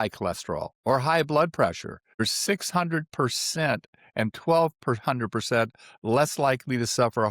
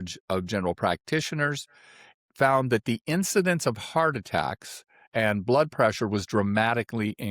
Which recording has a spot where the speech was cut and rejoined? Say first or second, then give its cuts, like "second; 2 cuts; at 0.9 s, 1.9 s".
first; 1 cut; at 2.2 s